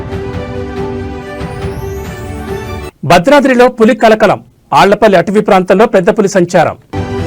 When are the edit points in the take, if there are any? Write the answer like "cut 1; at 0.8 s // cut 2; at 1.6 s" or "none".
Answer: cut 1; at 1.6 s

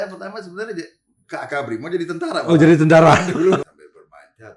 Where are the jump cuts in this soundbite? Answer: cut 1; at 3.6 s

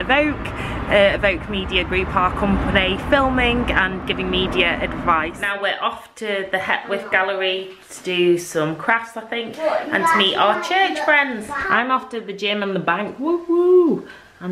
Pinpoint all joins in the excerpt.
cut 1; at 5.5 s // cut 2; at 11.5 s

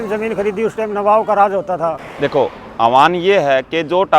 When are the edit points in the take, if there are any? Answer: cut 1; at 2.1 s

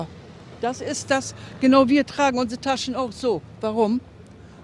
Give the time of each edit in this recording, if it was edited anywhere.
cut 1; at 0.9 s

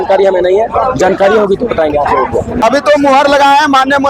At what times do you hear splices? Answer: cut 1; at 2.6 s

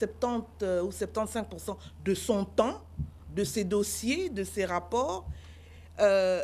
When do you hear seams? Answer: none

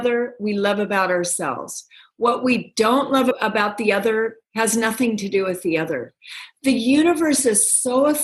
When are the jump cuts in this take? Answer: cut 1; at 3.3 s

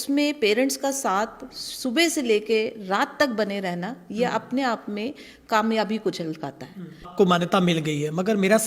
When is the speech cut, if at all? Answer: cut 1; at 7.1 s

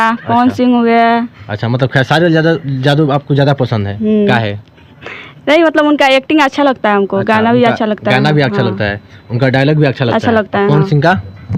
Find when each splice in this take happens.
none

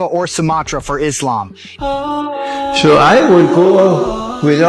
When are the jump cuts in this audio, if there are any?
cut 1; at 1.6 s

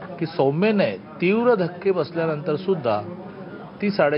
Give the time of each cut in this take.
none

